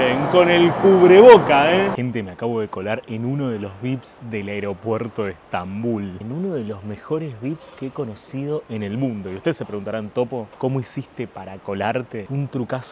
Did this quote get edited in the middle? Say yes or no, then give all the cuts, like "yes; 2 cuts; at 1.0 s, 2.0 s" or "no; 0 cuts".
yes; 2 cuts; at 1.9 s, 6.2 s